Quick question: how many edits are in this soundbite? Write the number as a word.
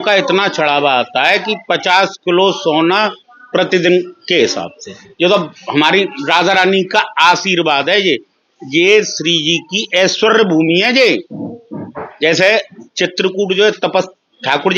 zero